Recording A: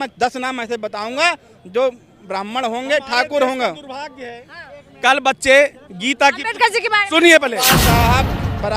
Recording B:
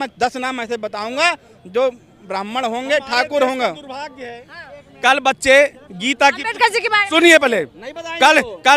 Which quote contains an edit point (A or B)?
A